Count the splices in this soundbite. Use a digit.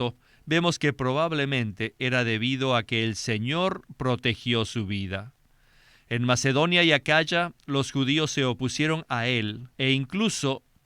1